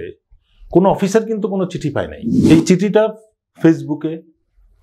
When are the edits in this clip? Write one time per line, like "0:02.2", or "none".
0:02.2